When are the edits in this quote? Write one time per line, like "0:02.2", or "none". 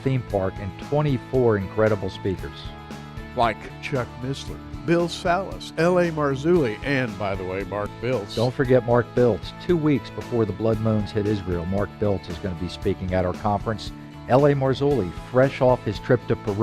0:13.4